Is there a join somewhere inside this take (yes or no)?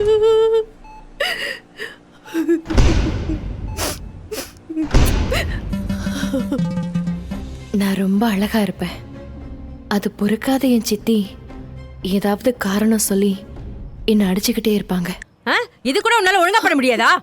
yes